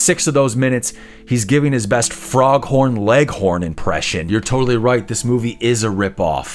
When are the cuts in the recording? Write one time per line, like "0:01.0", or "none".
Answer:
0:04.1